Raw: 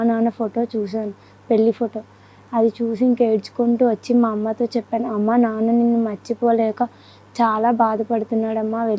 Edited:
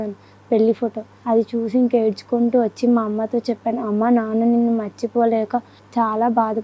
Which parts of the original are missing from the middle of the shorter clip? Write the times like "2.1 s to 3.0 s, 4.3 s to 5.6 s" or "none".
2.1 s to 2.3 s, 7.0 s to 7.2 s